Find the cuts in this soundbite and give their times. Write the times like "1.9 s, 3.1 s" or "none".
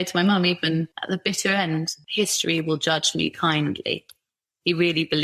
0.9 s, 2.0 s